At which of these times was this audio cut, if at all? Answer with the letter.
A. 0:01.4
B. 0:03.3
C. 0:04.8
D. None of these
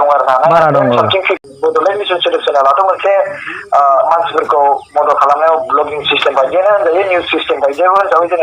A